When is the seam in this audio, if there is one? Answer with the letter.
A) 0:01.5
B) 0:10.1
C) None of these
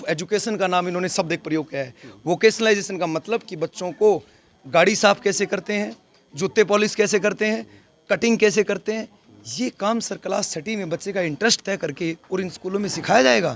C